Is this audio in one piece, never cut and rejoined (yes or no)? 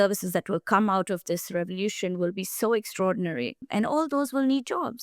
no